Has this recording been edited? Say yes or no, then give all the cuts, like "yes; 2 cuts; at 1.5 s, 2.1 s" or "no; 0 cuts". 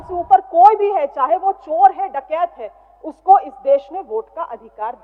no; 0 cuts